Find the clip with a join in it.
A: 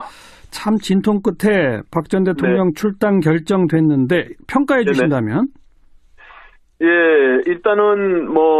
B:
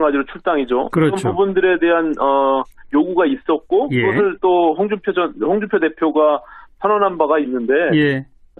B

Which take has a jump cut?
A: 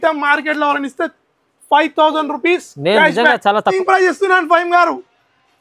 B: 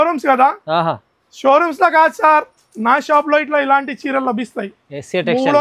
A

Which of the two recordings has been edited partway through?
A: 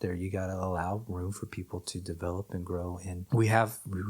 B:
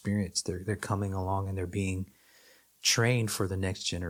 A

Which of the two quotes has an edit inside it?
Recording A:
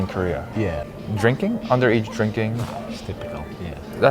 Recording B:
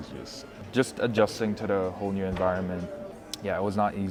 A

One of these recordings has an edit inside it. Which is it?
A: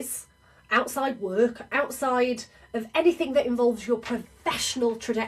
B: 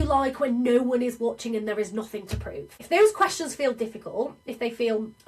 B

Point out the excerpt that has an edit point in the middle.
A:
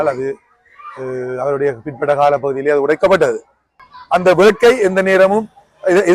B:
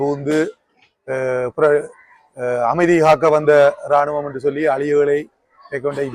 A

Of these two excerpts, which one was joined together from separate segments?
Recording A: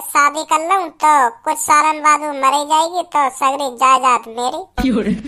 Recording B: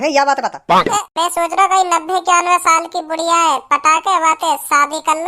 B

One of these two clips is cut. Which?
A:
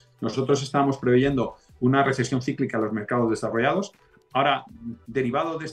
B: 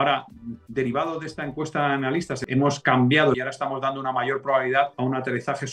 B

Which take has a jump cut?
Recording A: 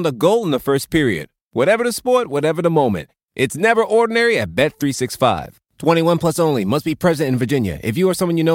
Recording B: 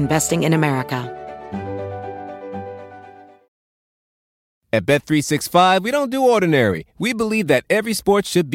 B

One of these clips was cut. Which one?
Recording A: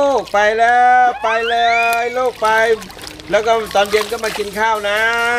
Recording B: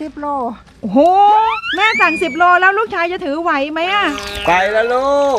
B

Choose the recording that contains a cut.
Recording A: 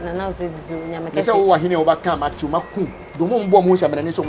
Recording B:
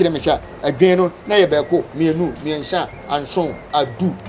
A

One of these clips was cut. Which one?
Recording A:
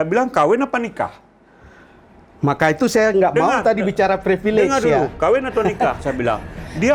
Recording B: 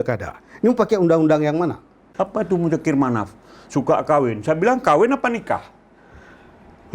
B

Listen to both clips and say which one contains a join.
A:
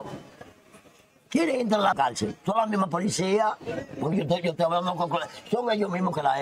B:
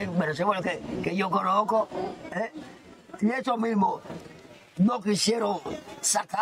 A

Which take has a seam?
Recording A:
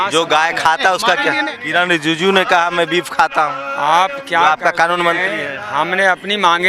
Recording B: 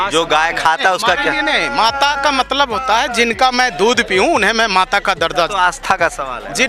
A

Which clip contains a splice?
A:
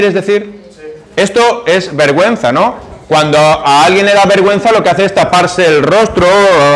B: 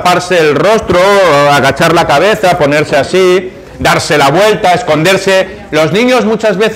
B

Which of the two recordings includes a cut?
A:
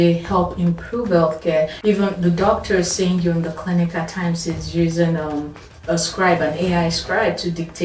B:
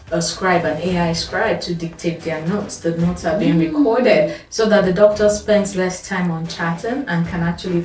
A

